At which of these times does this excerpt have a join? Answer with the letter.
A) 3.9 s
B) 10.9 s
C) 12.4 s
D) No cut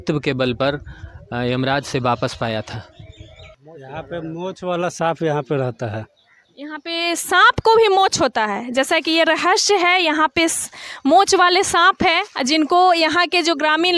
A